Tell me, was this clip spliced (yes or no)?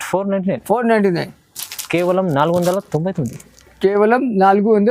no